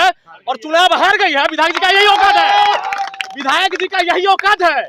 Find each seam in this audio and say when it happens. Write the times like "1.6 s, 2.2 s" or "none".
none